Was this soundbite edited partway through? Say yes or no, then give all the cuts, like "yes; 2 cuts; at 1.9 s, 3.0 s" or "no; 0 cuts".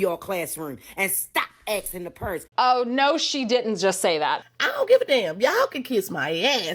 yes; 1 cut; at 4.6 s